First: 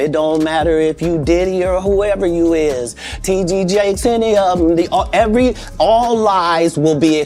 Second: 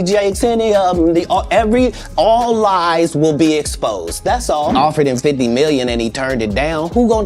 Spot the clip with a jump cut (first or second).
second